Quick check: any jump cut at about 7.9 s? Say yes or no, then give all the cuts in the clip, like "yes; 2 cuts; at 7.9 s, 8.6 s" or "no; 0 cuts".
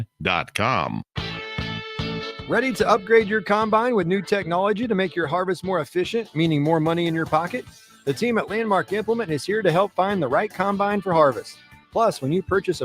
no; 1 cut; at 1.1 s